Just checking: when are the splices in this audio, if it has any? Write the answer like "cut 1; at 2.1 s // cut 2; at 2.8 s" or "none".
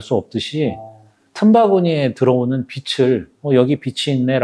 cut 1; at 3.3 s

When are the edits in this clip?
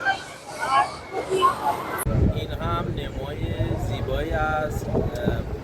cut 1; at 2.0 s

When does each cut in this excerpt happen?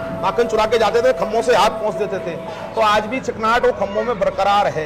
none

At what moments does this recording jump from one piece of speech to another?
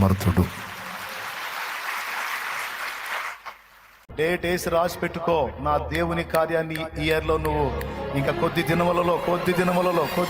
cut 1; at 4.1 s

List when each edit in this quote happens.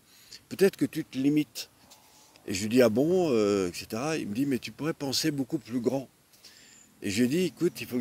none

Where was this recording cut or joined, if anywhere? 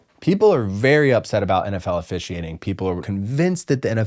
cut 1; at 3.0 s

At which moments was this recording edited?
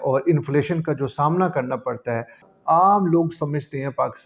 cut 1; at 2.3 s

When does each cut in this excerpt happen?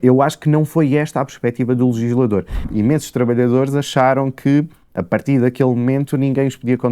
cut 1; at 2.6 s

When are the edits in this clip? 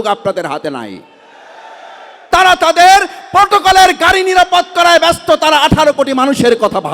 cut 1; at 2.2 s

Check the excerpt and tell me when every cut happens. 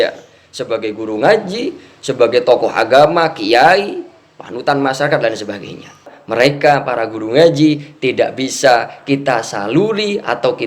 cut 1; at 6.2 s

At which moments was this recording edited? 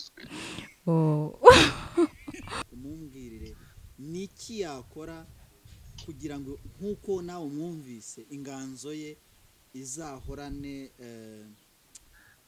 cut 1; at 2.6 s

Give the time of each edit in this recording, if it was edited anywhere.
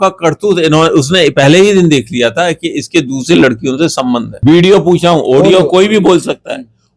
cut 1; at 4.3 s

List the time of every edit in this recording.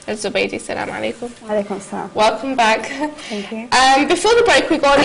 cut 1; at 3.5 s

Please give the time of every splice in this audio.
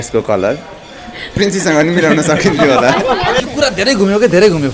cut 1; at 3.4 s

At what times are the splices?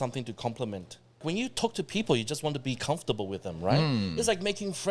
cut 1; at 1.2 s

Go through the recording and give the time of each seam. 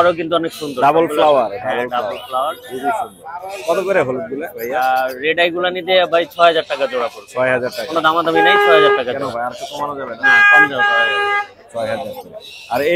none

